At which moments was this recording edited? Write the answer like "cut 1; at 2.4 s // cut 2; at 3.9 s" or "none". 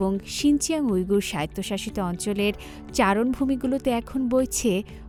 none